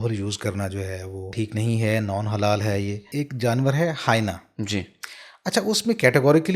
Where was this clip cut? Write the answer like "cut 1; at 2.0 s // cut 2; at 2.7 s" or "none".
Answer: cut 1; at 1.3 s // cut 2; at 3.0 s